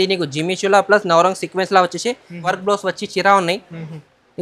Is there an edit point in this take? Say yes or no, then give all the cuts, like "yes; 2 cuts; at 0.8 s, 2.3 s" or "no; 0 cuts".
yes; 1 cut; at 2.6 s